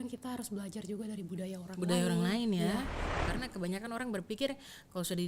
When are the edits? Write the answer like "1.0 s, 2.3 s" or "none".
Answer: 3.1 s